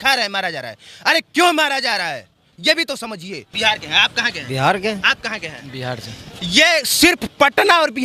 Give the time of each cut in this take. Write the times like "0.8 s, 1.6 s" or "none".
3.4 s